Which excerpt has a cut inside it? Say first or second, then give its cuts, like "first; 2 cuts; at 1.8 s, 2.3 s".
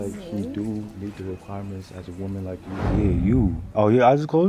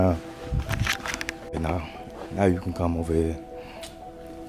first; 1 cut; at 2.9 s